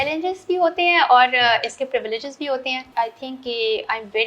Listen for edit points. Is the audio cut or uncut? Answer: cut